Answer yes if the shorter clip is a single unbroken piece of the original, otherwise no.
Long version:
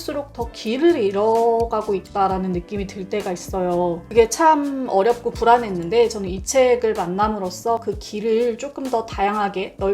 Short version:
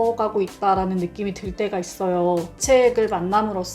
no